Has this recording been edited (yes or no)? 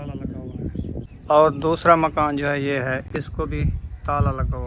yes